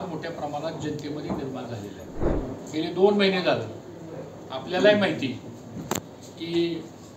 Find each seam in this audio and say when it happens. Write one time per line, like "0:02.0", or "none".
0:02.3